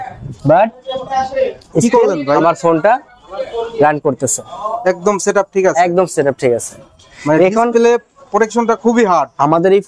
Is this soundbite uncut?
yes; 0 cuts

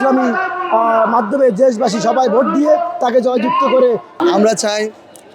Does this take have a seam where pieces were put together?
yes; 1 cut; at 4.2 s

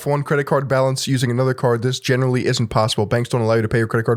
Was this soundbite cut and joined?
no; 0 cuts

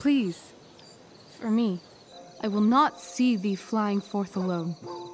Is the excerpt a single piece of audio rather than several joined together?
no; 1 cut; at 1.9 s

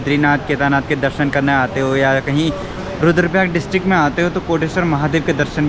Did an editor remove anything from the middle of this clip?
no; 0 cuts

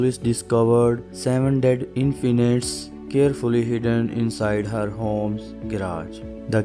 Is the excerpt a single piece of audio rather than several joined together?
yes; 0 cuts

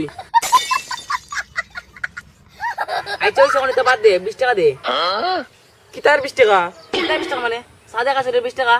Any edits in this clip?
no; 0 cuts

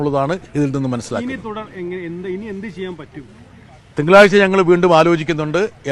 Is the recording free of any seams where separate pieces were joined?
yes; 0 cuts

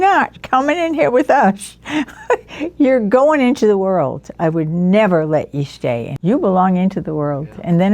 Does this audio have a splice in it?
no; 0 cuts

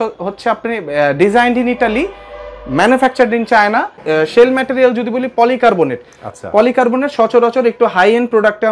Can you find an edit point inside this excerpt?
yes; 1 cut; at 4.0 s

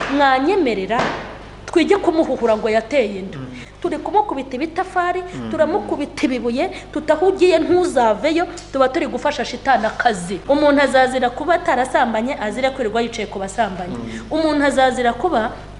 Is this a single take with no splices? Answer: no; 2 cuts; at 3.6 s, 10.3 s

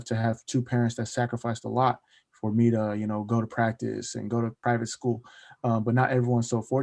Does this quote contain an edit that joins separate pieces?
yes; 1 cut; at 4.6 s

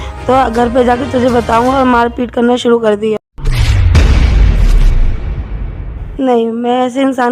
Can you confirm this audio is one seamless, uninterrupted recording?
no; 2 cuts; at 3.2 s, 5.9 s

